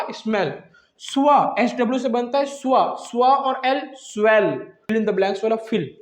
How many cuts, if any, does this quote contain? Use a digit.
1